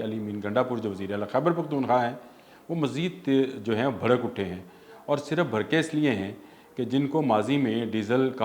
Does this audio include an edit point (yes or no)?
no